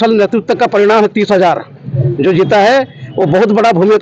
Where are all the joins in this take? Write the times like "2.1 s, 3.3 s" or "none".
none

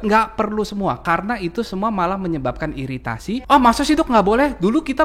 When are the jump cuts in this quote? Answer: 3.1 s

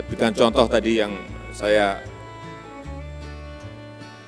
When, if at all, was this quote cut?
2.0 s, 3.6 s

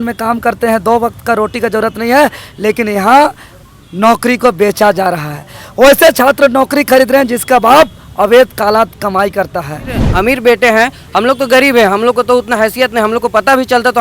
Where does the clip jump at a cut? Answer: 10.0 s

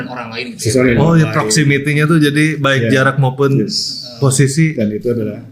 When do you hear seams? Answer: none

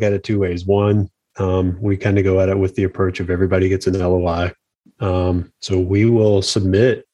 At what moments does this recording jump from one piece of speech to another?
none

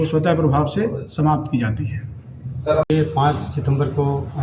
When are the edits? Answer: 2.9 s

